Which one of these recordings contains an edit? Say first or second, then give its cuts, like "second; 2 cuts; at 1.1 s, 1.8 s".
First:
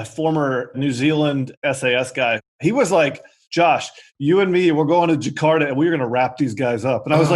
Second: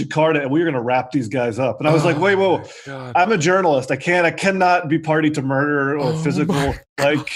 first; 3 cuts; at 0.8 s, 1.6 s, 2.6 s